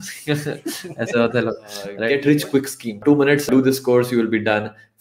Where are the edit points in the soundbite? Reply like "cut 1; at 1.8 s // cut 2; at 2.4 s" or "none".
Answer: cut 1; at 2.0 s // cut 2; at 2.9 s